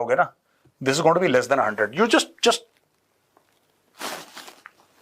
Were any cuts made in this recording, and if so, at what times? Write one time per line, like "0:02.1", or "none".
none